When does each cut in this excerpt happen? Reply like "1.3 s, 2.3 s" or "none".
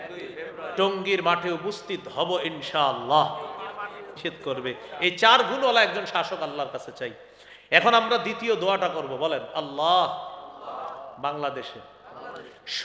4.2 s